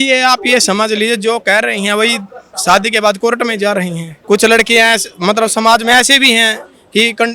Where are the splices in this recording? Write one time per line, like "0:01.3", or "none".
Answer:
0:04.1